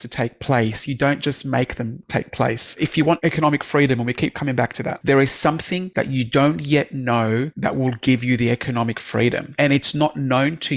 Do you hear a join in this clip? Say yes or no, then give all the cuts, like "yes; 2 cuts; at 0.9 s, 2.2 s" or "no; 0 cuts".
yes; 5 cuts; at 3.0 s, 4.9 s, 5.8 s, 7.5 s, 9.5 s